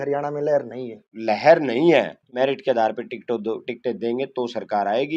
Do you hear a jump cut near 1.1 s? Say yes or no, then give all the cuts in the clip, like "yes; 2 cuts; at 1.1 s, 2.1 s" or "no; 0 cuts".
yes; 2 cuts; at 1.1 s, 2.2 s